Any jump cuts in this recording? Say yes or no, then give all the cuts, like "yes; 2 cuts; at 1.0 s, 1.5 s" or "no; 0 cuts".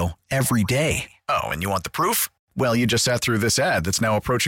no; 0 cuts